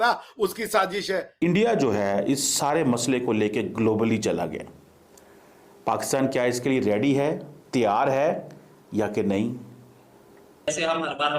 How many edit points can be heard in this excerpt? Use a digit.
2